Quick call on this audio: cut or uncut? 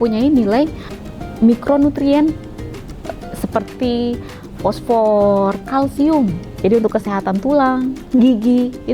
cut